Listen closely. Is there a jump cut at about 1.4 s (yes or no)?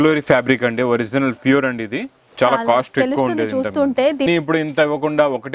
no